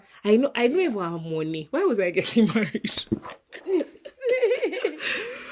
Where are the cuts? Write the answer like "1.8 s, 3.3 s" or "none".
none